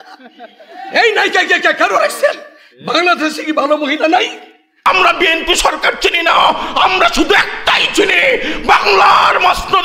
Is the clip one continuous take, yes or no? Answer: no